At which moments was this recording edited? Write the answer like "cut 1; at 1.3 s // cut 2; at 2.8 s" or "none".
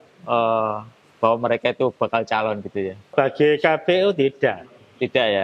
cut 1; at 3.1 s

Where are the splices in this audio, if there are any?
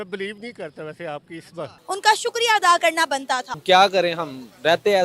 cut 1; at 1.7 s // cut 2; at 3.5 s

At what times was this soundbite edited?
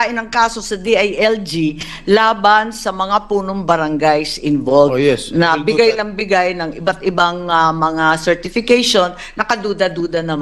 none

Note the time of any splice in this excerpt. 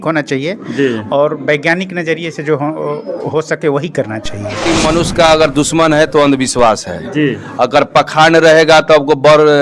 cut 1; at 4.7 s

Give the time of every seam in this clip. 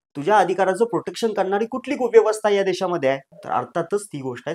cut 1; at 3.3 s

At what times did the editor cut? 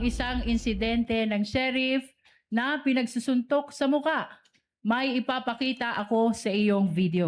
none

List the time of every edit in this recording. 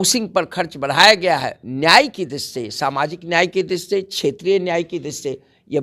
cut 1; at 1.6 s

